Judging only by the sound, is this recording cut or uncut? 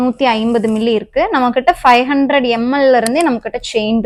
uncut